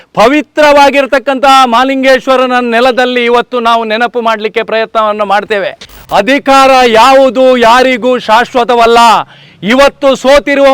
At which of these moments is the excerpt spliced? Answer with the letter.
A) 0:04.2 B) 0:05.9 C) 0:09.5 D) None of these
B